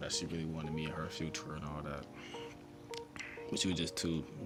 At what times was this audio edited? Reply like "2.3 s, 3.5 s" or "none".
none